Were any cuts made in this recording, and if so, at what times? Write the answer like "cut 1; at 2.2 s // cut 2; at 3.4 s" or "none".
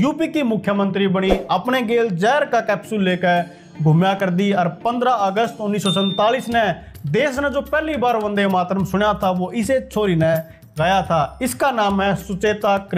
none